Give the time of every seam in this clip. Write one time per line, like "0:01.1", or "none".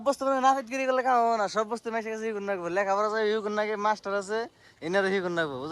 none